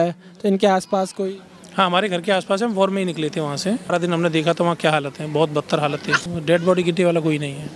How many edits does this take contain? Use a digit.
2